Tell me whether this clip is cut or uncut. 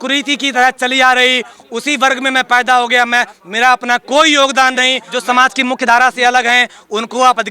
cut